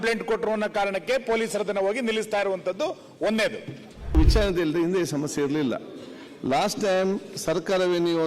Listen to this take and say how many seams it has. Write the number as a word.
one